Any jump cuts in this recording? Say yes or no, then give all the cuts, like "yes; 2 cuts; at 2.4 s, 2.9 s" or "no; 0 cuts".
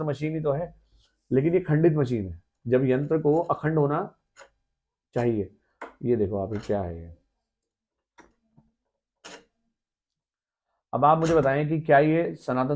no; 0 cuts